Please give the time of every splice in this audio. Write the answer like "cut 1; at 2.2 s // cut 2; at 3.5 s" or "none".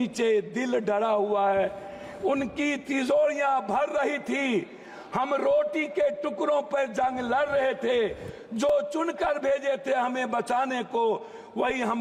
none

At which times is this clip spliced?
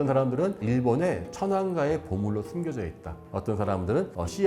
none

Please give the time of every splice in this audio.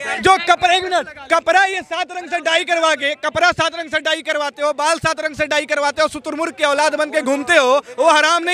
none

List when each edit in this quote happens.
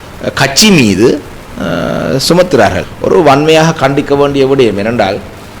cut 1; at 2.8 s

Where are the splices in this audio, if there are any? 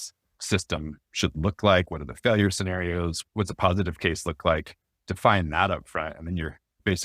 cut 1; at 3.2 s

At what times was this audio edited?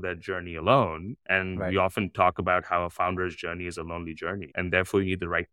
cut 1; at 4.5 s

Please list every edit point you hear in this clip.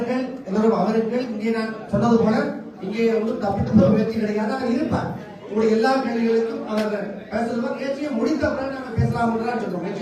none

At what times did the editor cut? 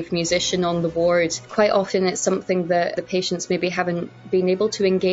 cut 1; at 1.4 s // cut 2; at 2.9 s

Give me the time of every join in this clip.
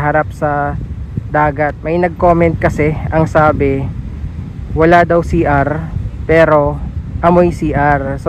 cut 1; at 1.8 s

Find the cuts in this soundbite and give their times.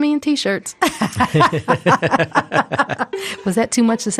none

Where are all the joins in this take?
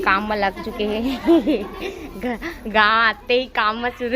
cut 1; at 1.2 s

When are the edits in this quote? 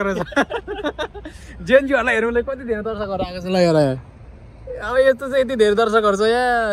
none

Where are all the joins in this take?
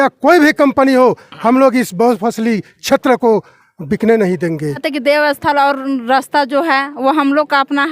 cut 1; at 4.8 s

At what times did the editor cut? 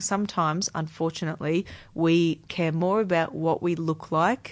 cut 1; at 2.8 s

